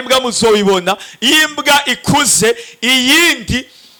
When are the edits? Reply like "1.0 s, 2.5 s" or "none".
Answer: none